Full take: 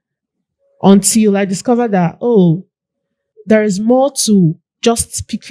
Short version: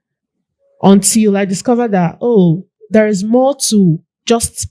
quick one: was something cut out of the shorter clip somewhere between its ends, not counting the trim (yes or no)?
yes